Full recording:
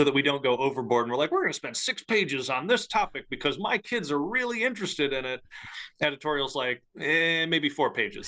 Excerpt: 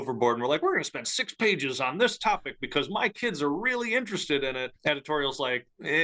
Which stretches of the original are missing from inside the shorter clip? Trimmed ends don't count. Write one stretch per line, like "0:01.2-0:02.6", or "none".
0:05.4-0:05.9

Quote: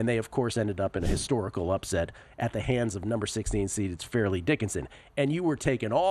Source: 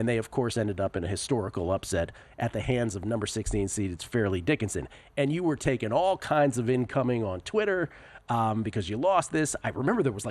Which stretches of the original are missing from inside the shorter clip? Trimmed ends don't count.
none

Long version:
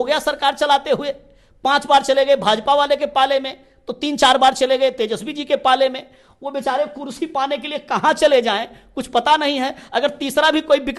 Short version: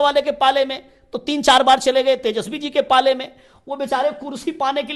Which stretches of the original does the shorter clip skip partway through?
none

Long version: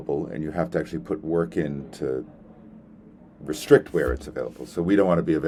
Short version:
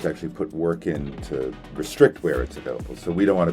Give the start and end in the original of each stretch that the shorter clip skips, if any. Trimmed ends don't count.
0:02.3-0:03.3

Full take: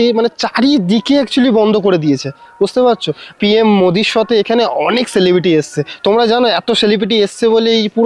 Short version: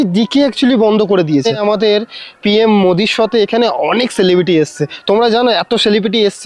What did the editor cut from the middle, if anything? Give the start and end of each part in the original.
0:02.7-0:03.0

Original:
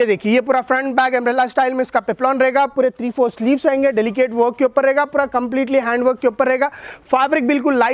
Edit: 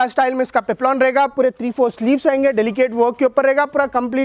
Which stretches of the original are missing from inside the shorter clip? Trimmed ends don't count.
none

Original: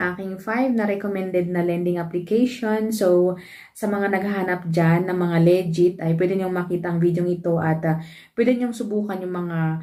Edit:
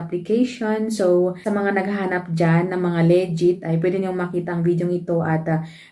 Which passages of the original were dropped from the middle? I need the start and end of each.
0:03.4-0:03.8

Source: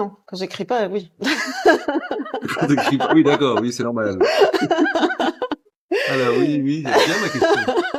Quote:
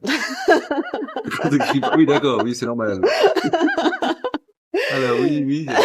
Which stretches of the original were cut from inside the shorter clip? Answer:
none

